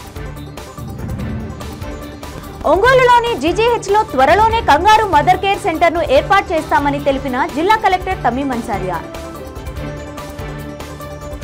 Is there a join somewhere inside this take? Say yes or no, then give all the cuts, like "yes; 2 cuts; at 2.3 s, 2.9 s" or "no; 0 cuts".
no; 0 cuts